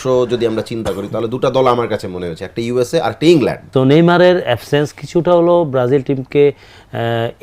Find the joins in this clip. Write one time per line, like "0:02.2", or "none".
0:03.6